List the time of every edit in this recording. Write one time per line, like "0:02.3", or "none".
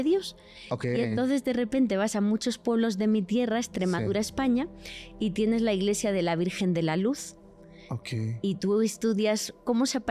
none